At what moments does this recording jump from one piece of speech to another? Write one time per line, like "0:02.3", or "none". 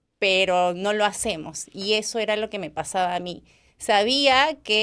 none